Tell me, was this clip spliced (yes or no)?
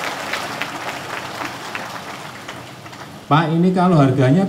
yes